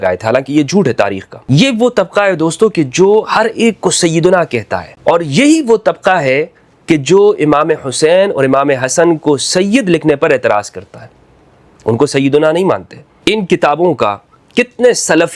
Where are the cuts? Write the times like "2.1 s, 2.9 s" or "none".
1.3 s, 4.8 s, 13.1 s